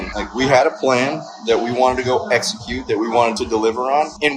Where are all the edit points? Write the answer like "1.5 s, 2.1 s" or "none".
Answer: 3.3 s